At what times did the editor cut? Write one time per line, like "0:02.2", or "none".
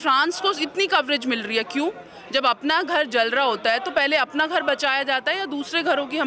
none